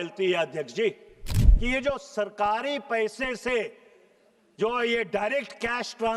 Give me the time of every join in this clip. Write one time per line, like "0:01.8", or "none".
0:01.4